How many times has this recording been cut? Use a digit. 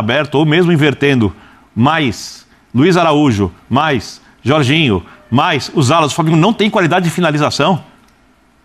0